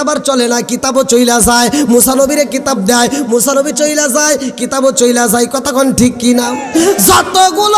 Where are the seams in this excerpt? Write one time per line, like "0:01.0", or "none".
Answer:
none

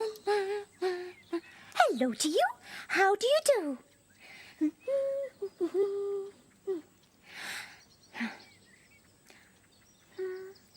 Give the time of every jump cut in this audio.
0:01.7

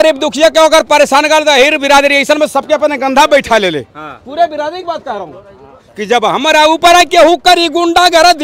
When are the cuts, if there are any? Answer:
none

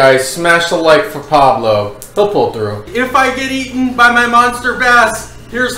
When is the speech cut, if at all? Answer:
0:02.9

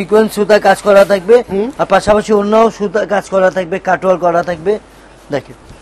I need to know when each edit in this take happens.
none

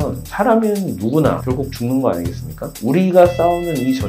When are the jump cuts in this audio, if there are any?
0:01.4
0:02.7

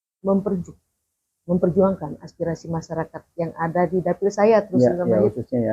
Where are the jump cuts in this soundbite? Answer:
none

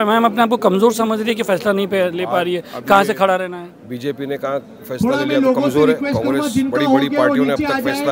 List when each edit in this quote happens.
none

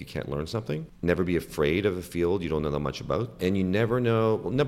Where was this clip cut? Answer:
0:00.9
0:03.4

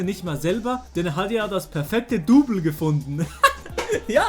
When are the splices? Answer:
0:00.9
0:03.3

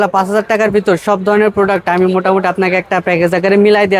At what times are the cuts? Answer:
none

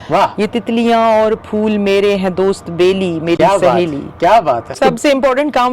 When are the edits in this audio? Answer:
0:04.7

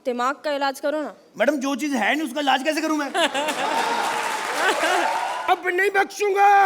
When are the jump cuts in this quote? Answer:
0:05.3

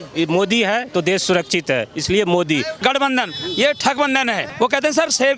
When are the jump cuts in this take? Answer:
0:02.8
0:04.5

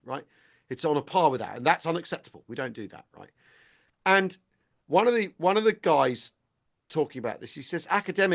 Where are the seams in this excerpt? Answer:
none

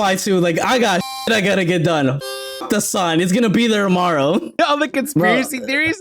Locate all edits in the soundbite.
0:04.6

